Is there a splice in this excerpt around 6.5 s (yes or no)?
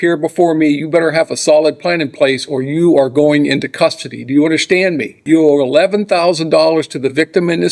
no